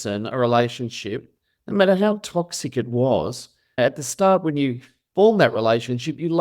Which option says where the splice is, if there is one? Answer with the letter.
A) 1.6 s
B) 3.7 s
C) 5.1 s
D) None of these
B